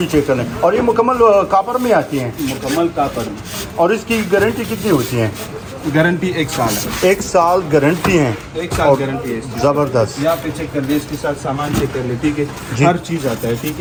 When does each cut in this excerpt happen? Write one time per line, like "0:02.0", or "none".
none